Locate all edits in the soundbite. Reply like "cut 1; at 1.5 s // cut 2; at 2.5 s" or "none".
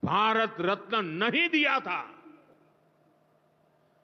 none